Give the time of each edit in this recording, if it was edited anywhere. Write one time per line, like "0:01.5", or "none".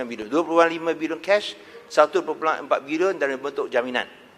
none